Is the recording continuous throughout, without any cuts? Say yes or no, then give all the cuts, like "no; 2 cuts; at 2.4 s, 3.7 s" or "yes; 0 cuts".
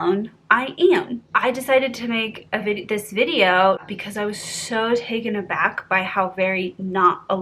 no; 1 cut; at 3.9 s